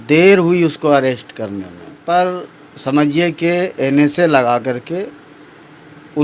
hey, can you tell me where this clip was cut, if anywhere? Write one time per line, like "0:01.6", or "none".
0:02.0

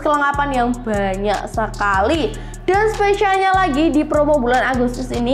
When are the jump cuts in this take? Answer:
none

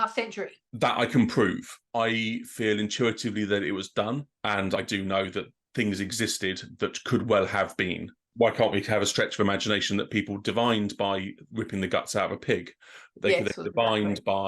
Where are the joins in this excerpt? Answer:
0:04.8
0:11.5

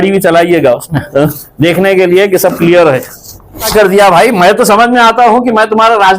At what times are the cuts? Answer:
0:03.7

